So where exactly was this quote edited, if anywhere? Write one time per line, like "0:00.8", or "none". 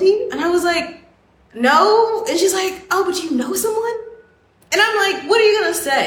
none

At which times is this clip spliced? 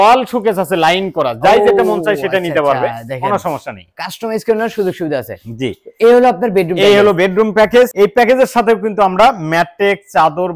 none

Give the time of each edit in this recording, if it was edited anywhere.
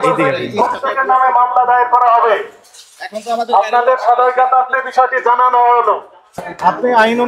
none

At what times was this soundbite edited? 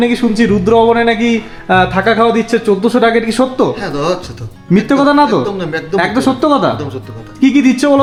none

